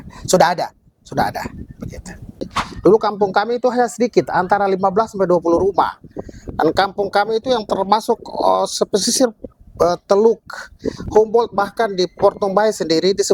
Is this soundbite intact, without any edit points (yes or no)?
no